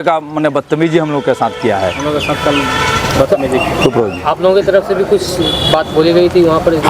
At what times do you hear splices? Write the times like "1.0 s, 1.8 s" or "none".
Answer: none